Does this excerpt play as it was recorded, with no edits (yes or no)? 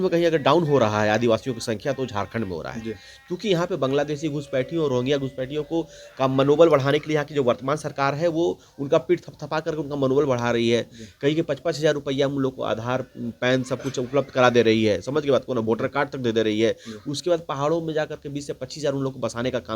yes